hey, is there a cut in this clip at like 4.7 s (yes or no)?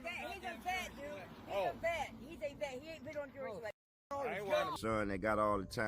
yes